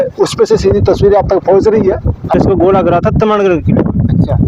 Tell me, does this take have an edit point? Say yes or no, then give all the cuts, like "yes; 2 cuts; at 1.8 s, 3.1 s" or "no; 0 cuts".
yes; 1 cut; at 2.3 s